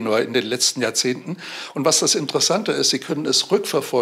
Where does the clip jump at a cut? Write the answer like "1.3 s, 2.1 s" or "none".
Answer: none